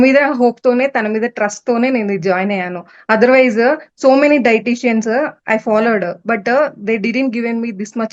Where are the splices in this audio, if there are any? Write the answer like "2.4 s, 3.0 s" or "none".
none